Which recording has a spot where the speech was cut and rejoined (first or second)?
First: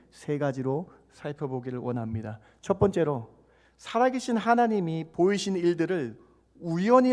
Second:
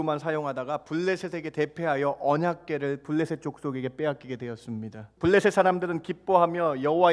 second